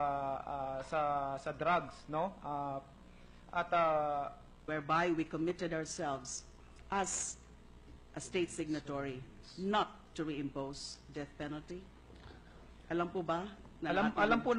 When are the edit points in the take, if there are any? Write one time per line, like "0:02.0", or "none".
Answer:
none